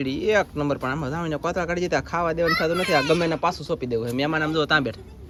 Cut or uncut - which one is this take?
uncut